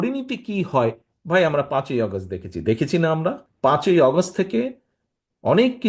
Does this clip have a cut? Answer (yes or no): yes